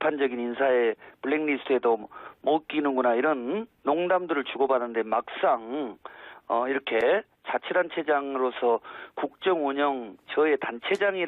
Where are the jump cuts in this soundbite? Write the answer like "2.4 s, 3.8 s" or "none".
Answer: 8.1 s